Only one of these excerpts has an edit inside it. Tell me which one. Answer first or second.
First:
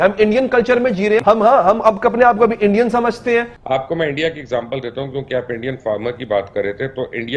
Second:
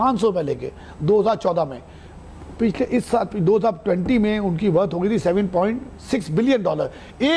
first